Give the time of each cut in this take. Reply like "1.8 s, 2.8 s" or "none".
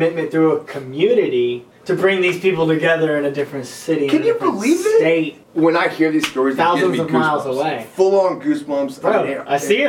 1.7 s, 5.4 s